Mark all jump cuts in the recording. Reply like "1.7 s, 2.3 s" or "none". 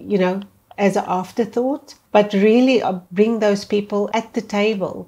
1.9 s, 3.0 s, 4.1 s